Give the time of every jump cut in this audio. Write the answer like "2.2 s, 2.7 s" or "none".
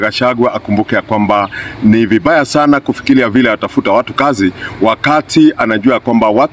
1.6 s